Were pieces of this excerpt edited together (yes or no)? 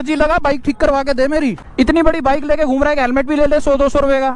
yes